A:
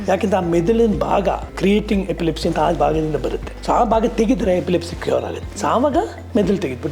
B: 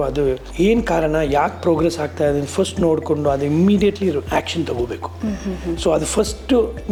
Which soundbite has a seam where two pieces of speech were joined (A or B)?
A